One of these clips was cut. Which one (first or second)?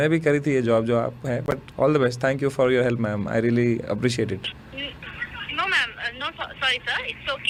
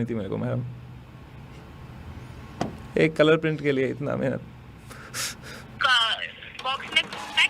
second